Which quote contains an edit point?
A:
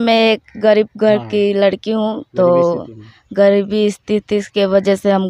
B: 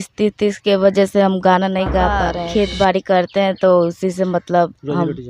B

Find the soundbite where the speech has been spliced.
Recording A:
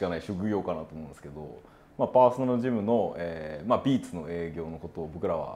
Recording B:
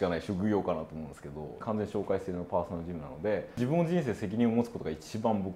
B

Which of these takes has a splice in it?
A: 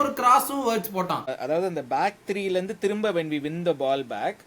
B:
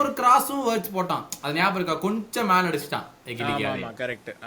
A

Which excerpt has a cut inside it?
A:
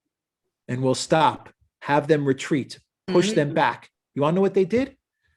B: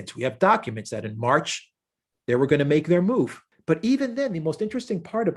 B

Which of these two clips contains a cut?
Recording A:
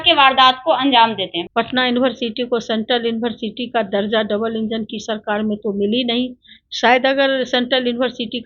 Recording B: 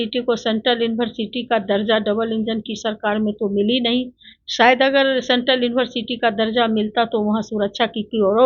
A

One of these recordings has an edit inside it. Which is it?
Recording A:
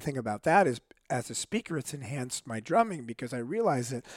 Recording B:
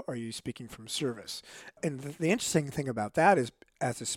B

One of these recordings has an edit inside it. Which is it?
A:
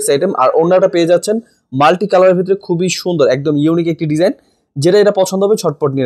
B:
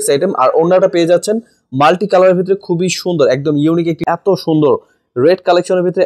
B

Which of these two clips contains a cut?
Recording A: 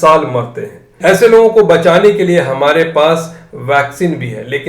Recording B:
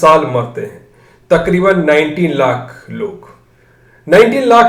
A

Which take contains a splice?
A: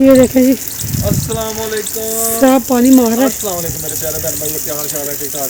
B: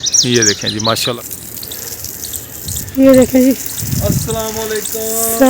B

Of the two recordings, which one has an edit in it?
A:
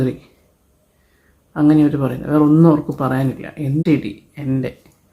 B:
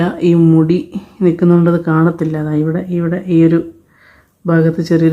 A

